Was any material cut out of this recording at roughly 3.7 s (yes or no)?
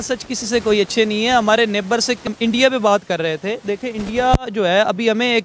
no